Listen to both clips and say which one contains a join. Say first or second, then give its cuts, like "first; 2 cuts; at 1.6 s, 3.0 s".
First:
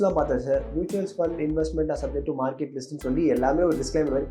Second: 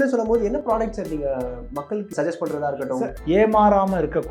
second; 1 cut; at 3.1 s